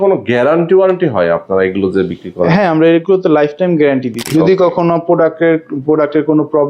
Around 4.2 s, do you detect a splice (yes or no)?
yes